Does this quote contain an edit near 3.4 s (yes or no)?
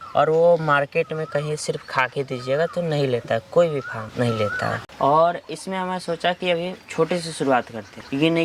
no